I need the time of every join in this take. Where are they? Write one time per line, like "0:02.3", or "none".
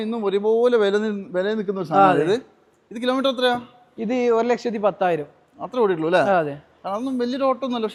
none

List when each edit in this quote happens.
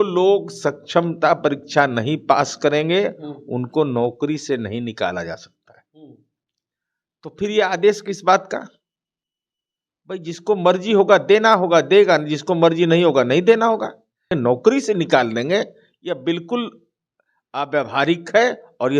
0:14.3

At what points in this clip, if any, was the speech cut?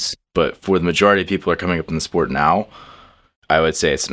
none

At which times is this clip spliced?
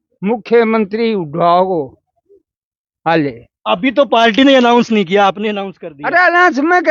none

